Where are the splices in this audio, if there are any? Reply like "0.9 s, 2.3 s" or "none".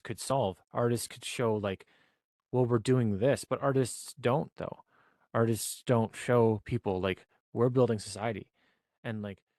none

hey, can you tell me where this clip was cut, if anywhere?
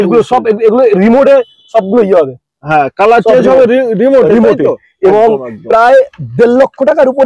none

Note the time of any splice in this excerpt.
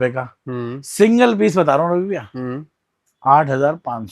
none

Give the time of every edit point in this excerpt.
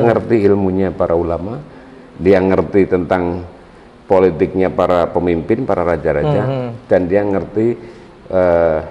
none

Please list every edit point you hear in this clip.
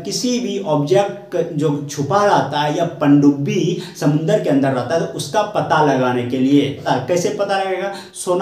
6.8 s

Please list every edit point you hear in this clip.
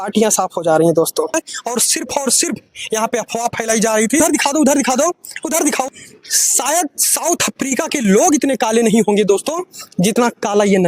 1.3 s, 4.2 s, 5.9 s

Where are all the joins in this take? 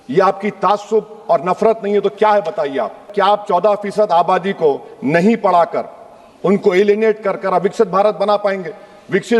3.1 s

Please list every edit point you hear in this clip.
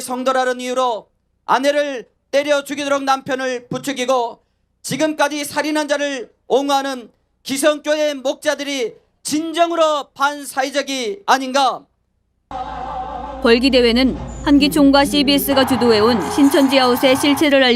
1.3 s

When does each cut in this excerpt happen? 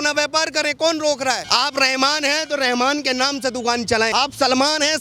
1.4 s, 4.1 s

